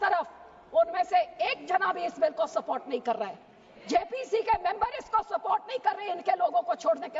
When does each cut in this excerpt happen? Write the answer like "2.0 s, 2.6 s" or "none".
none

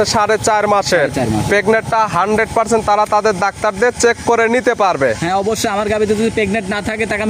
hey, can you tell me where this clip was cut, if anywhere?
none

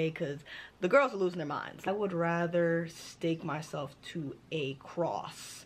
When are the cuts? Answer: 1.9 s

